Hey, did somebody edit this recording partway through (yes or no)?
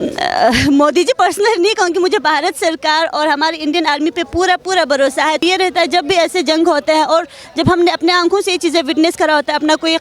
yes